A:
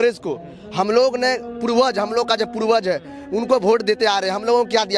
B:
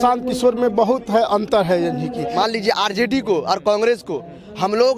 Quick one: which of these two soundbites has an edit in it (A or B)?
B